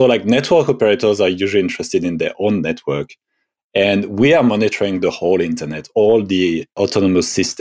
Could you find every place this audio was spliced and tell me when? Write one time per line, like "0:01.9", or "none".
0:06.7

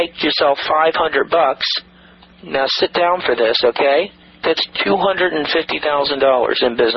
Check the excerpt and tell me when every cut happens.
0:04.2

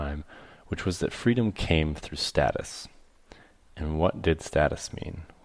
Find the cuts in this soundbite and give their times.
0:02.0

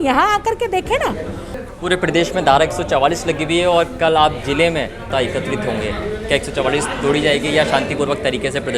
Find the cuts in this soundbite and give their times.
0:01.6
0:05.0

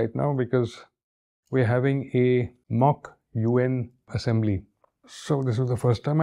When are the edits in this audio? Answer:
0:02.6
0:04.1
0:05.1

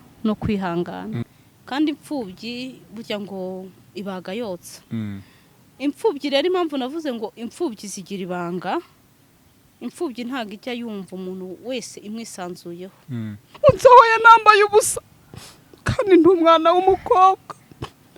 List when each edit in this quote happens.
0:01.2
0:13.5

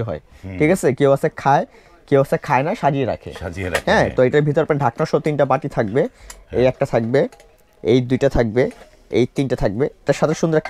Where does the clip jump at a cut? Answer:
none

